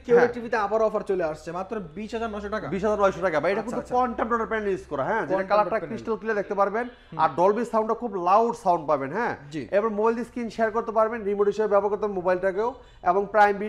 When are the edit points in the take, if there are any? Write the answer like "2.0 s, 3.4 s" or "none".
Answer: none